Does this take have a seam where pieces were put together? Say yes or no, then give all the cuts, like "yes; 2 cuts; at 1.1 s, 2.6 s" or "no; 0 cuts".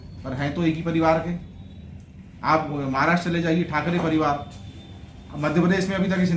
no; 0 cuts